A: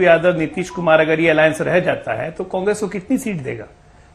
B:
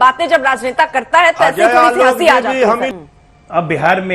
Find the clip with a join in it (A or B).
B